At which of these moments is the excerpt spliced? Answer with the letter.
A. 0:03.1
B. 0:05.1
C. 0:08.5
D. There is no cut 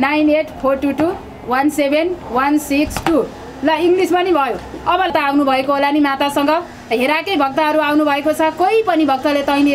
B